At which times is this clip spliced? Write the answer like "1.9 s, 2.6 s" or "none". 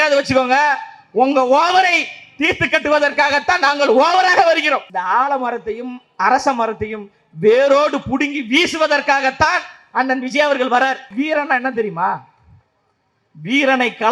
4.9 s, 11.1 s